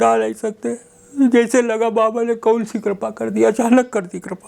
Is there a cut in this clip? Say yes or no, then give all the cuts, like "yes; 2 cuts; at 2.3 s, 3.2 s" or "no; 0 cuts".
no; 0 cuts